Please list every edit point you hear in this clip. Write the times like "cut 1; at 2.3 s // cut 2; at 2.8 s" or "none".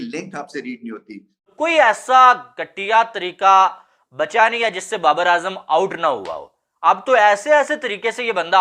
cut 1; at 1.5 s